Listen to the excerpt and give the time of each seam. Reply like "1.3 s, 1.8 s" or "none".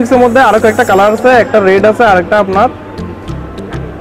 none